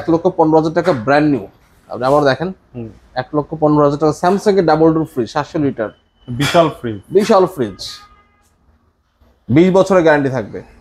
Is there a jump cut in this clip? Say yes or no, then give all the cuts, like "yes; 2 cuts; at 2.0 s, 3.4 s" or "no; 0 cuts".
no; 0 cuts